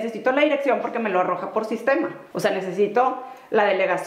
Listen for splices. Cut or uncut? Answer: cut